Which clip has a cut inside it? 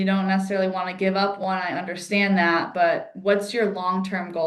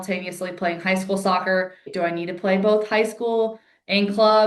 second; 1 cut; at 1.9 s

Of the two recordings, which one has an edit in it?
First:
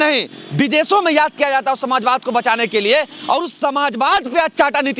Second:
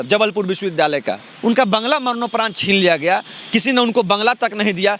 second; 1 cut; at 1.3 s

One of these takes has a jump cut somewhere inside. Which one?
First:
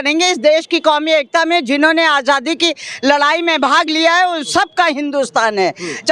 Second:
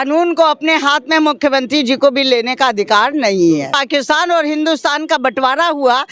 second; 1 cut; at 3.8 s

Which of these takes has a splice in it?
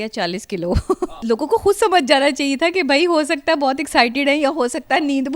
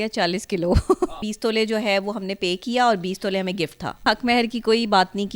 second; 2 cuts; at 1.2 s, 4.0 s

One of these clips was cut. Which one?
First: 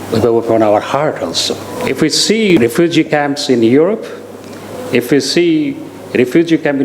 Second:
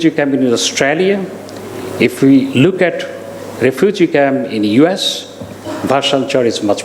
first; 2 cuts; at 1.8 s, 2.6 s

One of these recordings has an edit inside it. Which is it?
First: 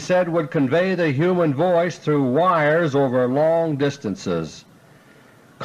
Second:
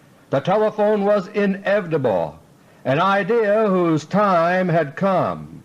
second; 1 cut; at 3.0 s

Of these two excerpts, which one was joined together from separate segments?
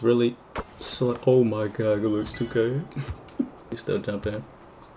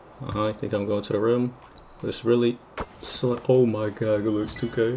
first; 1 cut; at 3.8 s

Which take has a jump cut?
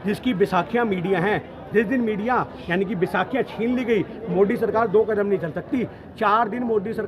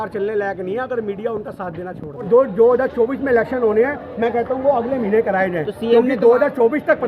second; 1 cut; at 2.3 s

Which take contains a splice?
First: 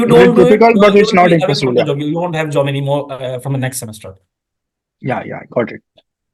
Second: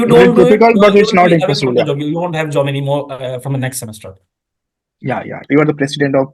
second; 1 cut; at 5.4 s

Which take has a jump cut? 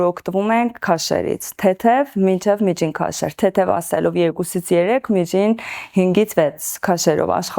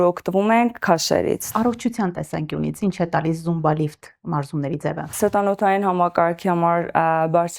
second; 2 cuts; at 1.5 s, 5.0 s

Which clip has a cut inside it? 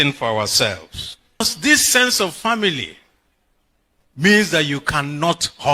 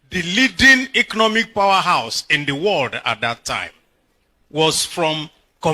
first; 1 cut; at 1.4 s

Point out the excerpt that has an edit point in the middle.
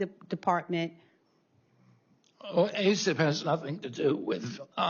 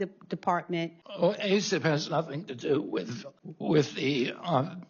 second; 2 cuts; at 1.0 s, 3.2 s

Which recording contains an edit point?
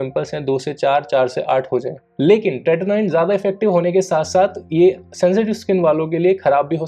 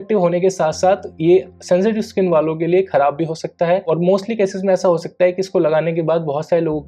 first; 1 cut; at 2.1 s

